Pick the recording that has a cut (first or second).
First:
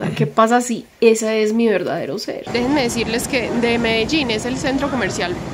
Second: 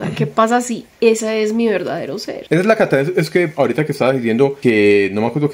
first